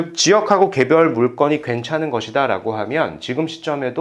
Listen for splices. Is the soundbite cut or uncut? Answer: uncut